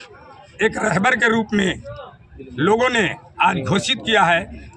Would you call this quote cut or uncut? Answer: uncut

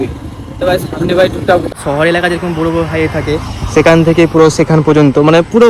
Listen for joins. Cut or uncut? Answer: cut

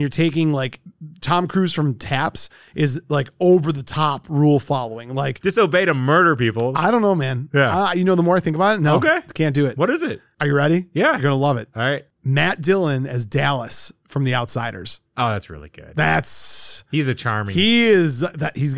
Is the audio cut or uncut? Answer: cut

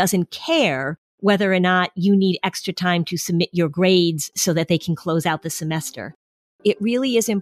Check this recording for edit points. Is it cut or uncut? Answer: uncut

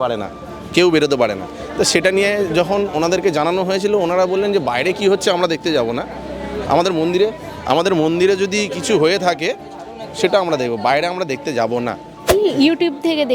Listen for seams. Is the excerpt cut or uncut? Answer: cut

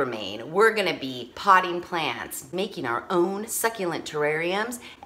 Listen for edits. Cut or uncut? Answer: uncut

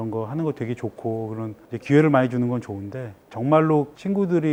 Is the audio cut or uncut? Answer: uncut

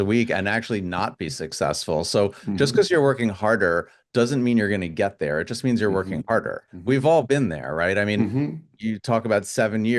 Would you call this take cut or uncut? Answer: cut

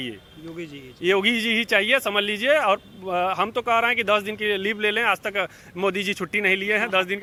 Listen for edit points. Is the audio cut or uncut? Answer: uncut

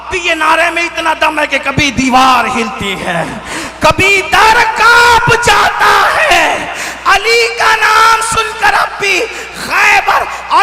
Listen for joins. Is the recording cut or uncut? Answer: uncut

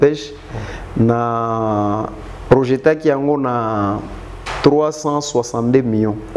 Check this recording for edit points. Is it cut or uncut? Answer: uncut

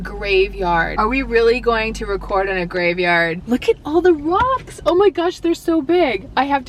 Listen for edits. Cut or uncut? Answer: cut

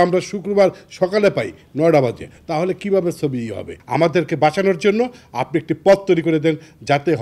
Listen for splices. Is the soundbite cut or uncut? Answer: cut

